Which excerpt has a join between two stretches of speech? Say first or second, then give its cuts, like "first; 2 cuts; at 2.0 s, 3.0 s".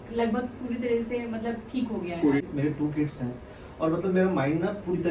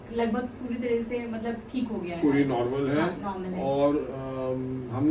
first; 1 cut; at 2.4 s